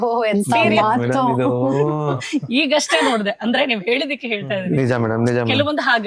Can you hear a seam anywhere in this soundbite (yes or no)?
no